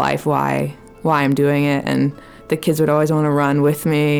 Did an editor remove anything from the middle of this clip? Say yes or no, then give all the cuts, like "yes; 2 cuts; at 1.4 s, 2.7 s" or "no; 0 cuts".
no; 0 cuts